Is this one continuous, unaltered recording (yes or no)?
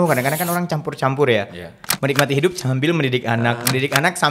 yes